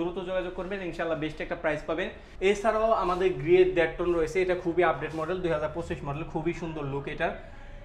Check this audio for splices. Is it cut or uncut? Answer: cut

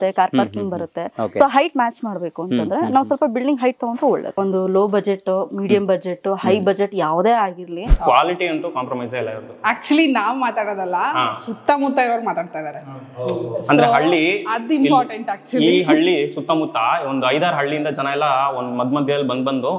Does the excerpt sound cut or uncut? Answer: cut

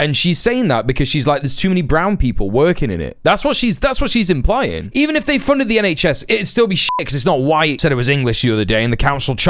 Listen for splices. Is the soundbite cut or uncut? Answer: uncut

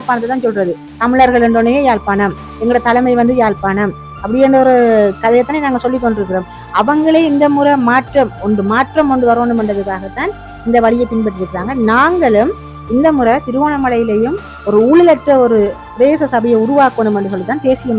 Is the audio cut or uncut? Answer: uncut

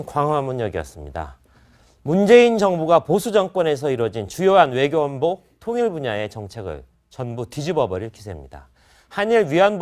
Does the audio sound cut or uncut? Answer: uncut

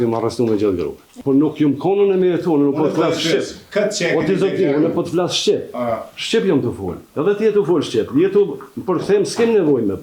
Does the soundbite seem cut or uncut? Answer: cut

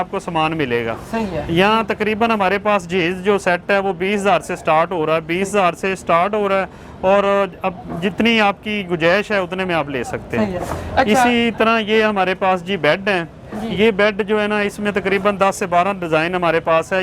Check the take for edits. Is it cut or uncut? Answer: uncut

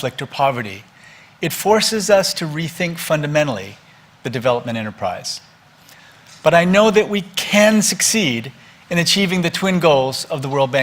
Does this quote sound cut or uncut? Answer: cut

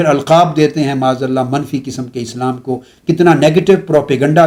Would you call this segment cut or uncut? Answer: uncut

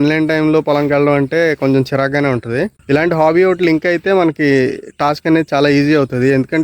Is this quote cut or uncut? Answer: cut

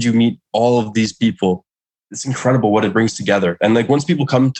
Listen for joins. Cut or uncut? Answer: cut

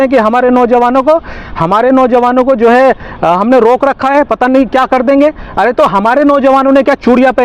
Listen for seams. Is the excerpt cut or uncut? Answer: uncut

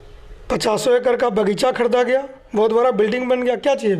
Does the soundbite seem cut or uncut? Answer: uncut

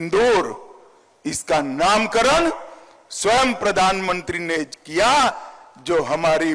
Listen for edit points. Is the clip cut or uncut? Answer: uncut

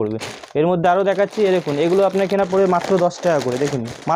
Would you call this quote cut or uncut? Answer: uncut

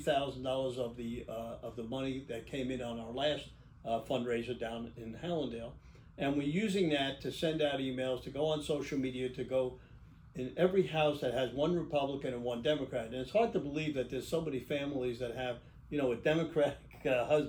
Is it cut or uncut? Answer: uncut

